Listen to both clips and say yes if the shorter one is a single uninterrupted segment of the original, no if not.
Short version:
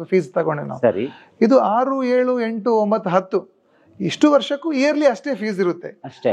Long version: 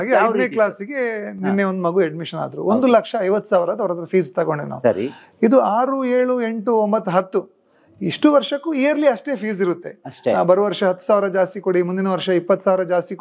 yes